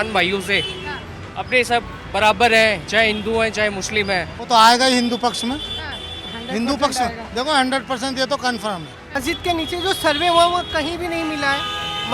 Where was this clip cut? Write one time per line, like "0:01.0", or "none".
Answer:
0:04.3
0:09.0